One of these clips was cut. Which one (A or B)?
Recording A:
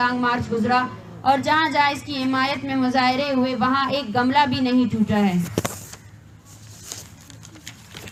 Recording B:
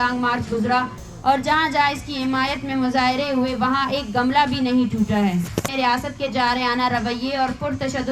B